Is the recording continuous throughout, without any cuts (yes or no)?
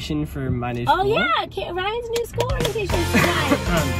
yes